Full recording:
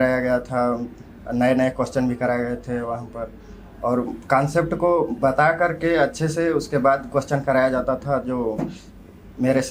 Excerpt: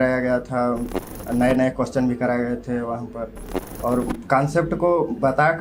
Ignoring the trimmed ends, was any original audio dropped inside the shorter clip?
no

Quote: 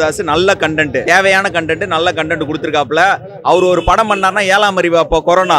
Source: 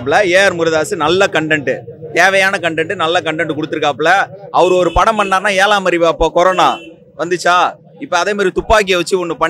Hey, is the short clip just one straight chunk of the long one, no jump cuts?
no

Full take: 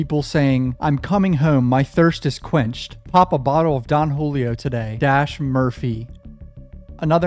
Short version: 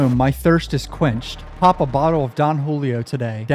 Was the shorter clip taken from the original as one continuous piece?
yes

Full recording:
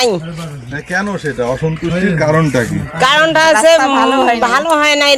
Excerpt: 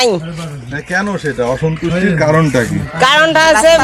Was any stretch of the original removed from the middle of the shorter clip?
no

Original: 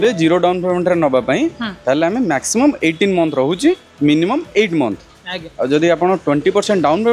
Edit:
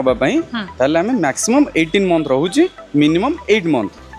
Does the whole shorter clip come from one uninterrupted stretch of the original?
yes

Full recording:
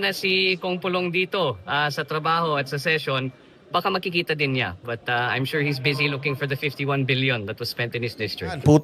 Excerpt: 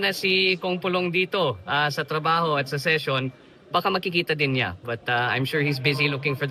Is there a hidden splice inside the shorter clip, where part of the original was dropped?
no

